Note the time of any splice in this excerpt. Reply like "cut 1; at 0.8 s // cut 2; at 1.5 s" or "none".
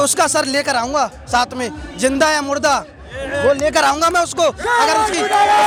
none

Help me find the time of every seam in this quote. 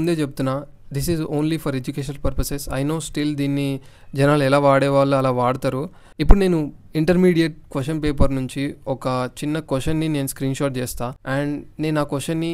none

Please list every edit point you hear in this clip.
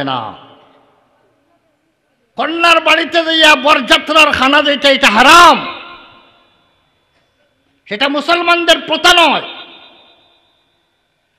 cut 1; at 2.3 s

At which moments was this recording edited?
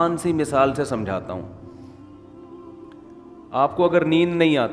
cut 1; at 1.7 s // cut 2; at 3.3 s

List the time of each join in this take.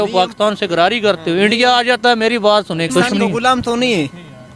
cut 1; at 2.9 s

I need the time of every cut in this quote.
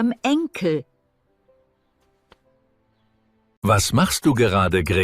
cut 1; at 3.5 s

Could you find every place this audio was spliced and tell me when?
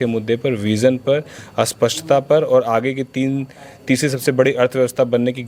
none

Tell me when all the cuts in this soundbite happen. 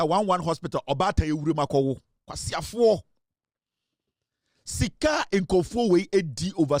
none

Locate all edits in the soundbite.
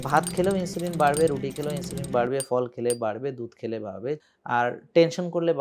cut 1; at 4.3 s

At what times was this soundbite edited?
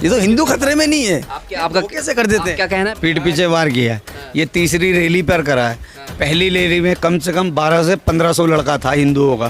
cut 1; at 2.9 s

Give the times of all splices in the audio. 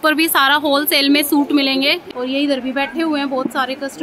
cut 1; at 2.0 s

